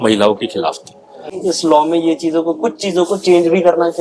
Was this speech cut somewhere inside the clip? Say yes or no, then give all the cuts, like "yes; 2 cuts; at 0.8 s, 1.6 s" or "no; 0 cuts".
yes; 1 cut; at 1.3 s